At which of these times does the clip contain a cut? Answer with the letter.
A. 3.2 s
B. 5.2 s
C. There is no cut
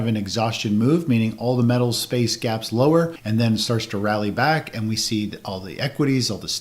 A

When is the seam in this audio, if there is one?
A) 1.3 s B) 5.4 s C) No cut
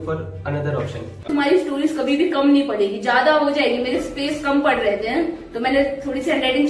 A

